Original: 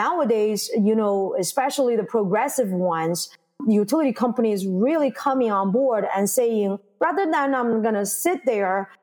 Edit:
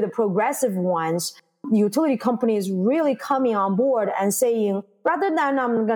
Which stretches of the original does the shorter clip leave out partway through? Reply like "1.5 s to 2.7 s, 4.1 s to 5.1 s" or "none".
none